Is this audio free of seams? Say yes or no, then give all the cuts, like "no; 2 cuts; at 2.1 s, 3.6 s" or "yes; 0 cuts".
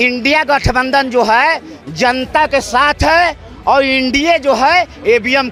yes; 0 cuts